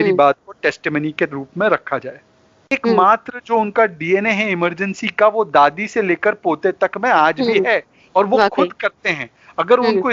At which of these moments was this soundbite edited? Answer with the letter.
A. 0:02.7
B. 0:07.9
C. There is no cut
A